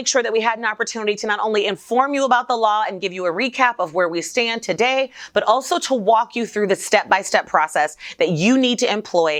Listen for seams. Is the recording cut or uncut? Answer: uncut